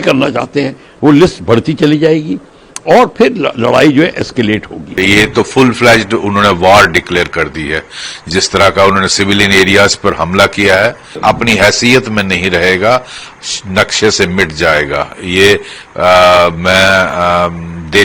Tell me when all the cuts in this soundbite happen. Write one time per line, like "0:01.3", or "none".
0:05.0
0:11.1

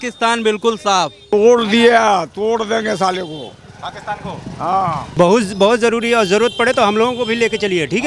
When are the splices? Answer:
0:01.2
0:05.1

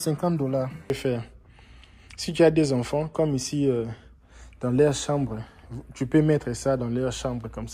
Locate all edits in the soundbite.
0:00.9

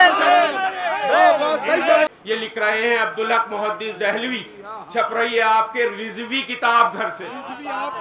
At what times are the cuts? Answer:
0:02.1

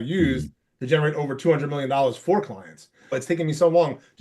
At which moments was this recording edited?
0:03.2

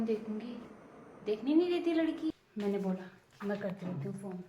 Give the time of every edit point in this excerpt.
0:02.4

